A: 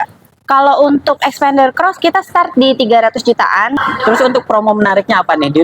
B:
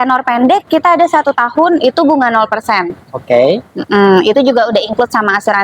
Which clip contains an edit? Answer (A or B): A